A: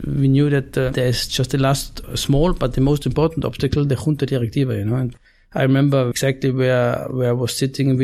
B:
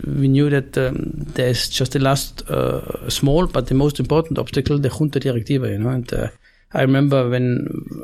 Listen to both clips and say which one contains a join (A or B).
A